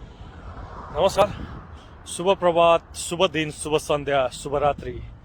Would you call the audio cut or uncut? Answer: cut